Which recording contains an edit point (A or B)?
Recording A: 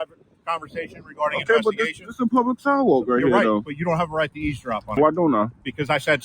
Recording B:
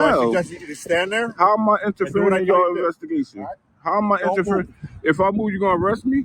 A